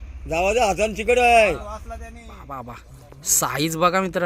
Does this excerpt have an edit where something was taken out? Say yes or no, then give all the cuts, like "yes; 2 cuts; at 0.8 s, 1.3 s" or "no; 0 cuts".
yes; 1 cut; at 2.3 s